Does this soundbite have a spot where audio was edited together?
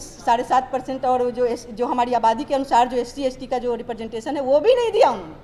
no; 0 cuts

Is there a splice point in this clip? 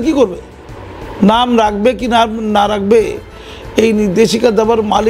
no; 0 cuts

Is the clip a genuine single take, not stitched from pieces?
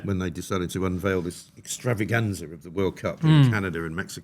yes; 0 cuts

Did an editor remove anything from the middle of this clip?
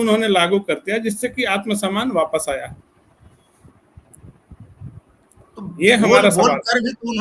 no; 0 cuts

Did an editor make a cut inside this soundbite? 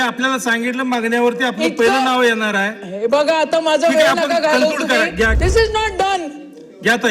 yes; 1 cut; at 5.3 s

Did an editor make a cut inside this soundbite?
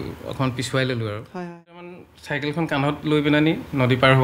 yes; 1 cut; at 2.0 s

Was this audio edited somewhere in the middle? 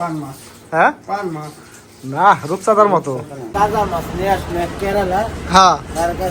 yes; 1 cut; at 3.4 s

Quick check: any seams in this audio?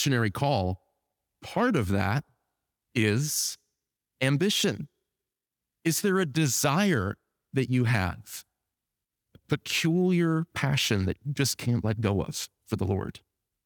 no; 0 cuts

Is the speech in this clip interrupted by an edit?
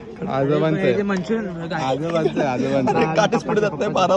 no; 0 cuts

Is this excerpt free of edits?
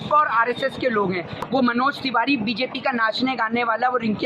no; 1 cut; at 1.4 s

